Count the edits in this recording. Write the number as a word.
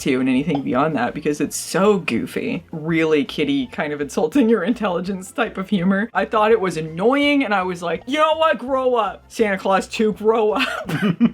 two